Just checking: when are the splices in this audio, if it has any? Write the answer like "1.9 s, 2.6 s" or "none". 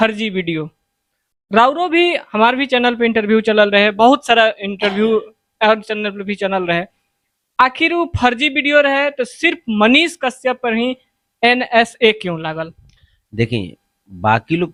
none

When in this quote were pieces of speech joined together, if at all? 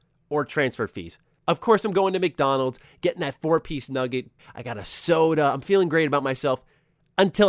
1.3 s, 4.4 s

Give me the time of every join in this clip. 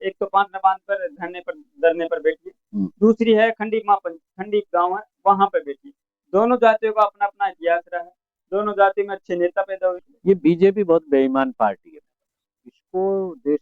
10.1 s

